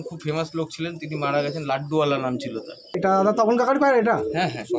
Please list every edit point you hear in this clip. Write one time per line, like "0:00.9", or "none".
0:03.0